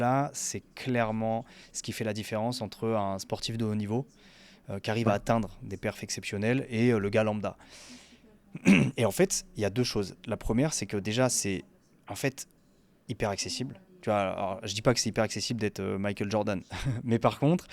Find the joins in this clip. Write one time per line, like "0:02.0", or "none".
none